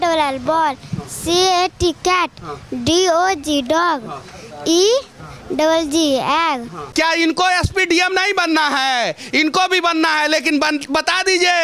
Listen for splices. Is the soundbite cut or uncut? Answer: cut